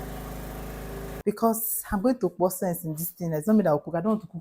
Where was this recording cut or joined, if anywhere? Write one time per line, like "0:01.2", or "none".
0:01.1